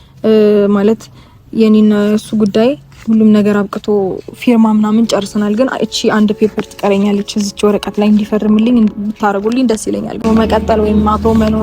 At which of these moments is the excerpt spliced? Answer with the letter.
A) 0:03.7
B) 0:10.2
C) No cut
B